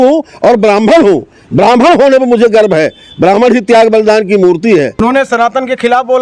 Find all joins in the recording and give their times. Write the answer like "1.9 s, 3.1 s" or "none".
5.0 s